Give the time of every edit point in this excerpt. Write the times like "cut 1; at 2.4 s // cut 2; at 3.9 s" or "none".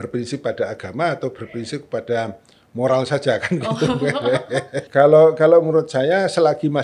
cut 1; at 4.9 s